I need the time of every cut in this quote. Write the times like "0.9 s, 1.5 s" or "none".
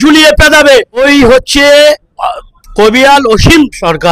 1.0 s

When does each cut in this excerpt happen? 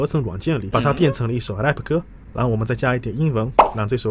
2.2 s

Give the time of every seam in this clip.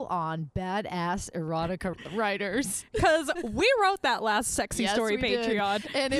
2.0 s

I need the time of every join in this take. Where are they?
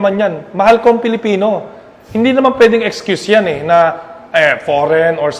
none

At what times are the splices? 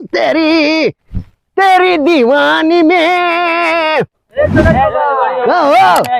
none

